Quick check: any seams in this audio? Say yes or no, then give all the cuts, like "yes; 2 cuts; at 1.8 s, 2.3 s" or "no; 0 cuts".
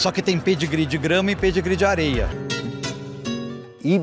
yes; 1 cut; at 2.4 s